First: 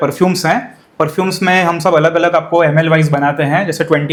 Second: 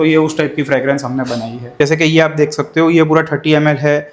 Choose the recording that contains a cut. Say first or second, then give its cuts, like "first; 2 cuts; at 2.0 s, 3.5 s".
second; 1 cut; at 1.6 s